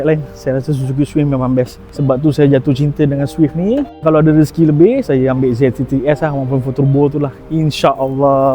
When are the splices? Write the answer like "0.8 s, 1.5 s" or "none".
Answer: 1.8 s, 4.0 s